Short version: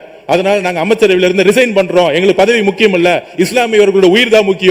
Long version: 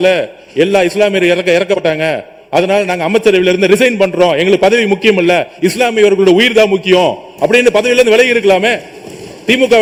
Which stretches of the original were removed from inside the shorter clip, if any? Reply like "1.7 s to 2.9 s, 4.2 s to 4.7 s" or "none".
none